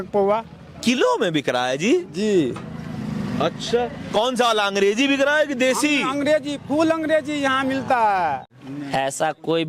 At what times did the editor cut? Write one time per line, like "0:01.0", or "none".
0:08.6